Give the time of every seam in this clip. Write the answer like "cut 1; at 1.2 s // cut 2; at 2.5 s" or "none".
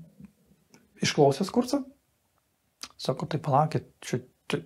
none